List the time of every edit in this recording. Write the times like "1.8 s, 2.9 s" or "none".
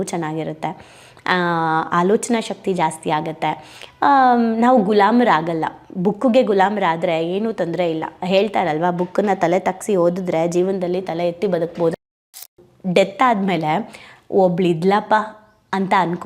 12.6 s